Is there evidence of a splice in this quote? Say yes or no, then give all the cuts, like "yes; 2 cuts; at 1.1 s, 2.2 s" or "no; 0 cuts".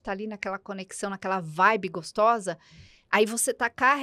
no; 0 cuts